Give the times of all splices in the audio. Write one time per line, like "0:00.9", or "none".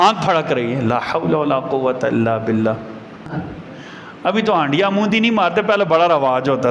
0:03.3